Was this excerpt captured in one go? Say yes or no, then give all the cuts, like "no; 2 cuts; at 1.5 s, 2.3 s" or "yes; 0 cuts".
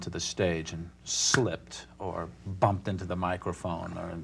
yes; 0 cuts